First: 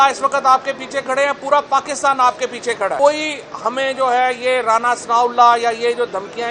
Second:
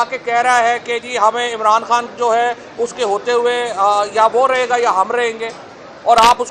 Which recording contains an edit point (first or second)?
first